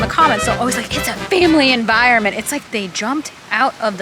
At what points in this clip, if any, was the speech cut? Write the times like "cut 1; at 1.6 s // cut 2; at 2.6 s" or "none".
cut 1; at 2.7 s